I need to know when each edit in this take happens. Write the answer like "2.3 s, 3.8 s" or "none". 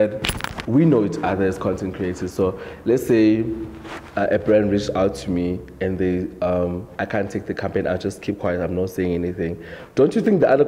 none